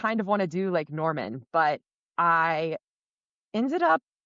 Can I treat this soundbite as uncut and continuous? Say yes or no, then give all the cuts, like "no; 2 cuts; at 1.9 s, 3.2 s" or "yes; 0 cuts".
yes; 0 cuts